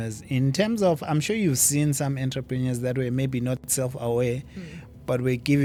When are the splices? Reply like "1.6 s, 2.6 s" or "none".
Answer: none

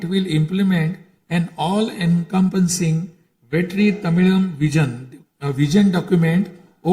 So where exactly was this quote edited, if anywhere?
none

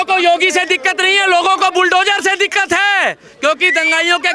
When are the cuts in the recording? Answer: none

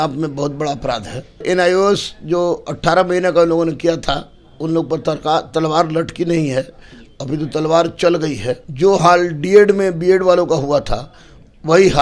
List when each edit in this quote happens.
1.4 s, 8.7 s

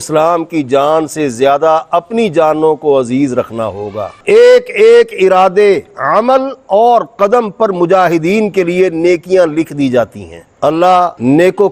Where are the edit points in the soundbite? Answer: 4.1 s, 10.5 s

